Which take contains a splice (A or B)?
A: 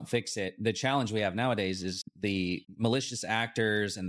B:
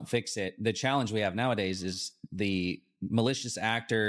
A